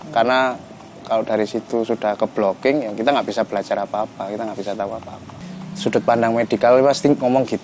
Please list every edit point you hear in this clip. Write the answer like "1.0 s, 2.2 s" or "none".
5.4 s